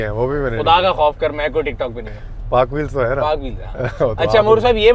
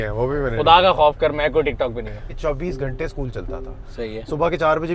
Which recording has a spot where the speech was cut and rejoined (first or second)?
second